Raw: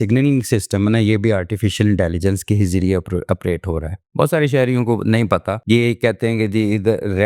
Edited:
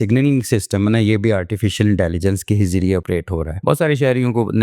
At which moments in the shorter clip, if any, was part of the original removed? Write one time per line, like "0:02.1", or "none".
0:03.2